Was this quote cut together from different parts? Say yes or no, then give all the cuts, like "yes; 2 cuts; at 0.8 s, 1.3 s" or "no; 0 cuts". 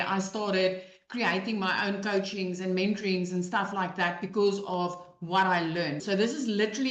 yes; 1 cut; at 6.0 s